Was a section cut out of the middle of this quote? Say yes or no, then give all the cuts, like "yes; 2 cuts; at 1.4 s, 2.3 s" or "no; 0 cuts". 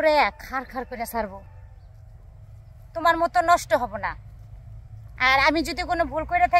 no; 0 cuts